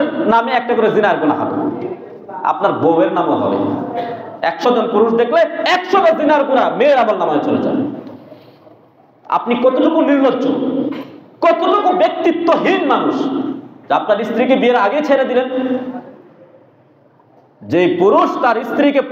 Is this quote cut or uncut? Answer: uncut